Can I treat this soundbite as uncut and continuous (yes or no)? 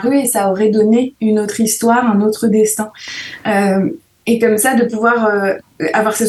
yes